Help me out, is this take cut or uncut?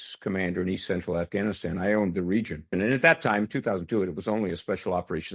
cut